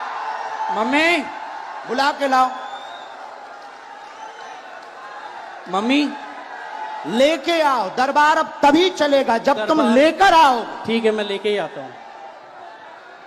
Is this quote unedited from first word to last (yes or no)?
yes